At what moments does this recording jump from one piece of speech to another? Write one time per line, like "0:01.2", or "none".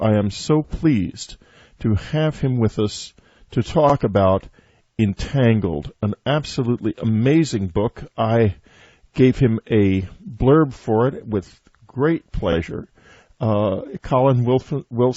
0:10.0

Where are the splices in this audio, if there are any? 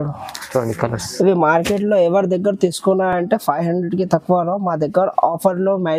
none

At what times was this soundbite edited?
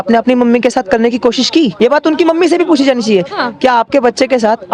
0:01.7

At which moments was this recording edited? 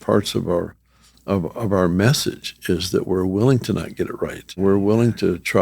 0:04.6

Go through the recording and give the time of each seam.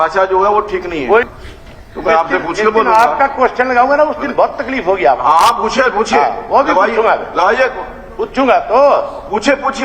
0:01.3

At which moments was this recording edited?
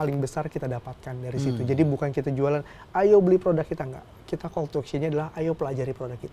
none

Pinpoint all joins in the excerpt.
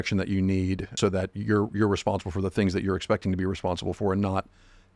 0:00.9

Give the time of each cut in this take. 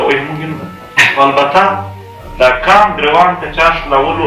0:01.1

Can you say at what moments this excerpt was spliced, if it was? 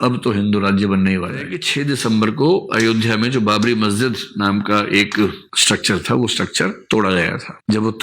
0:01.5

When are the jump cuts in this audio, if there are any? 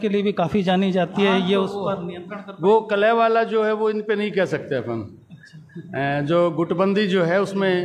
none

